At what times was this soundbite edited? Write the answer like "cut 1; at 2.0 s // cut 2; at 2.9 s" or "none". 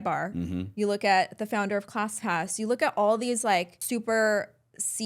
cut 1; at 3.8 s